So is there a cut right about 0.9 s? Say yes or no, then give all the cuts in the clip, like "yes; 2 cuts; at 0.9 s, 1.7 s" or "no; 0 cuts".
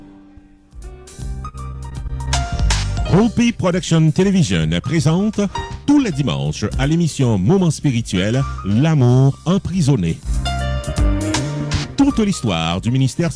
yes; 1 cut; at 0.9 s